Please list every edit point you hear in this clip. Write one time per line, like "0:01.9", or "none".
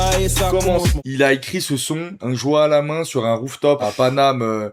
0:01.0
0:02.1
0:03.8